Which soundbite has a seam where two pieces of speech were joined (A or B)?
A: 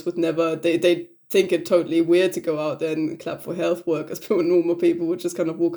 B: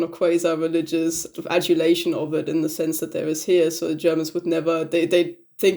B